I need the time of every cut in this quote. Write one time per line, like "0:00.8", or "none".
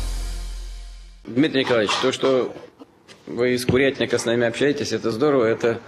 0:01.3